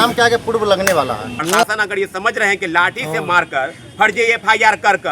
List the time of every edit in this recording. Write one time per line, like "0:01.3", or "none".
0:01.3

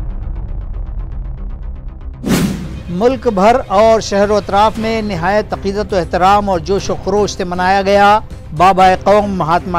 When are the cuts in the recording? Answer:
0:02.7

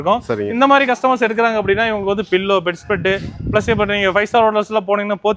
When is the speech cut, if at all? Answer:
none

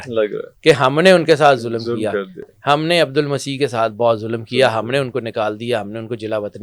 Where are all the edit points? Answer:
none

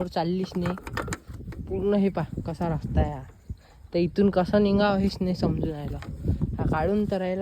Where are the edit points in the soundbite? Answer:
0:01.7

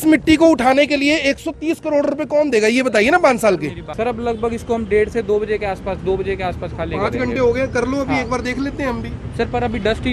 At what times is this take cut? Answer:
0:03.8

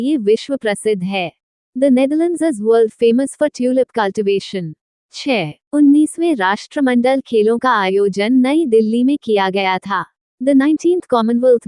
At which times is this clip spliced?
0:05.3

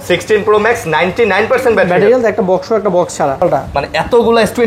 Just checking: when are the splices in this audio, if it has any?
0:03.4

